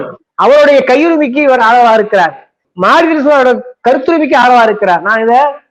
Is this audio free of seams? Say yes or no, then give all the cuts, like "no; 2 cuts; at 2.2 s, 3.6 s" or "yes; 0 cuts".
yes; 0 cuts